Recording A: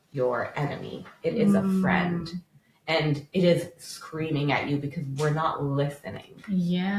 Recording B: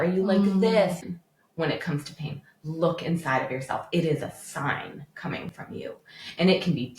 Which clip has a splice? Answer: B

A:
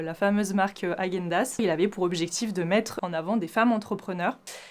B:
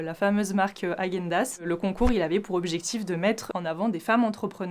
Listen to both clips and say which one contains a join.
A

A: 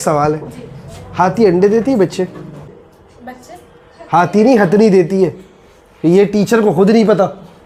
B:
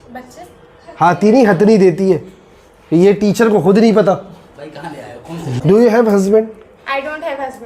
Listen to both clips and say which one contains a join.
B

